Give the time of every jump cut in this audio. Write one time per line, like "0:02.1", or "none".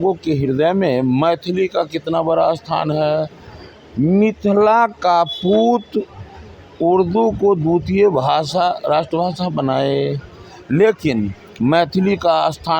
none